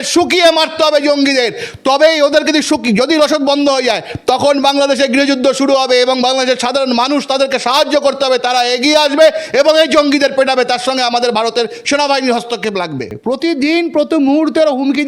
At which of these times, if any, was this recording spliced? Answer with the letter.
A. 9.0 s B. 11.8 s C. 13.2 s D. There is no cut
C